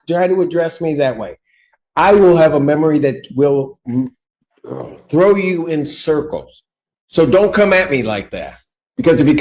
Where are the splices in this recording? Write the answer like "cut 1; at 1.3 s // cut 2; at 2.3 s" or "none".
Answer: none